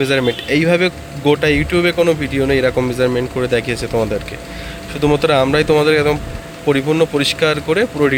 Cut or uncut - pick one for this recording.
uncut